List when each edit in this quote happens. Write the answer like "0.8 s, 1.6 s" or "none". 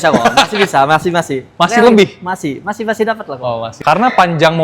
3.7 s